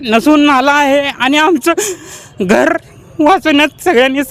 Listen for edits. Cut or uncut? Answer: uncut